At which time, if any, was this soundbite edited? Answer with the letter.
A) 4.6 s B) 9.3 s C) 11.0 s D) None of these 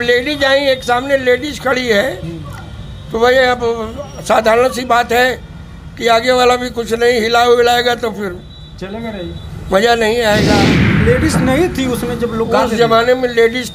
C